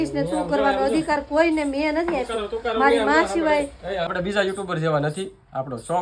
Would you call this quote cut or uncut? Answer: uncut